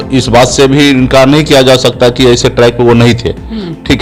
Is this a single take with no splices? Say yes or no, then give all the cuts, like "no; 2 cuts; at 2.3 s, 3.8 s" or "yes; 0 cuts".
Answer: yes; 0 cuts